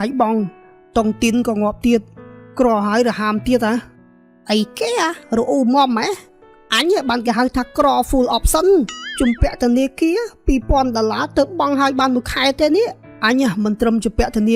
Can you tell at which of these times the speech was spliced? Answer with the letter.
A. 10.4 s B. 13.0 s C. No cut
B